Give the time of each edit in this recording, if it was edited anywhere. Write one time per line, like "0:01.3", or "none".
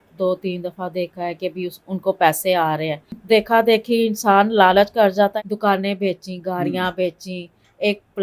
0:03.2
0:05.3

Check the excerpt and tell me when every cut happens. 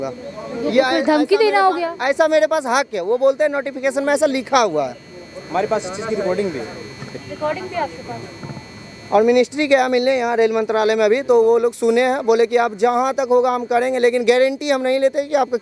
none

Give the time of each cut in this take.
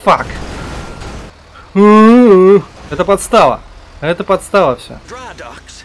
0:01.3
0:02.8
0:05.0

